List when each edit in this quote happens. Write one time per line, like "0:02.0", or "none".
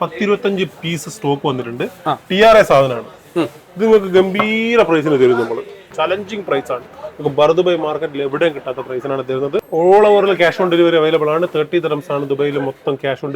0:05.9
0:09.6